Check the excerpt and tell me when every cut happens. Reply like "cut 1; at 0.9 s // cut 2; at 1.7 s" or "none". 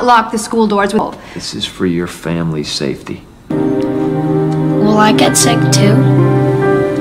none